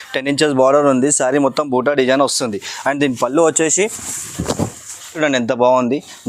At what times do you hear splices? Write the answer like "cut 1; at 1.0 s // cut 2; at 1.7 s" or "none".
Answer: cut 1; at 5.2 s